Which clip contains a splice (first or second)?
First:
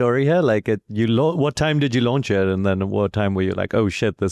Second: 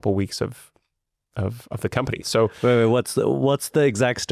second